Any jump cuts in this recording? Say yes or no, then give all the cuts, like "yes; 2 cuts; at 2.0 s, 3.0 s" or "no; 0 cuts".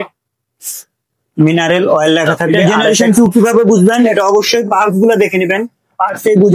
yes; 1 cut; at 2.5 s